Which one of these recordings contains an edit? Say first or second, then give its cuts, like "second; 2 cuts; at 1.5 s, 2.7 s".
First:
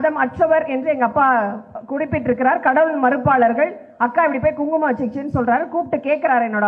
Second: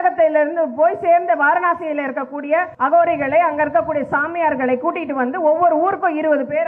second; 1 cut; at 2.7 s